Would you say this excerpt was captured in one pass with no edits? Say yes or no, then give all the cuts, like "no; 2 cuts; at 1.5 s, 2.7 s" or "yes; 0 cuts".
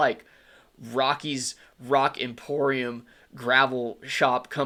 yes; 0 cuts